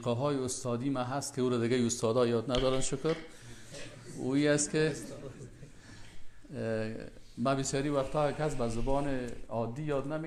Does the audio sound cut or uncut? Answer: uncut